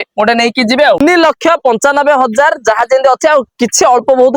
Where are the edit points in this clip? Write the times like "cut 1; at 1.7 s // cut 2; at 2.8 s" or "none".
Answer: cut 1; at 1.0 s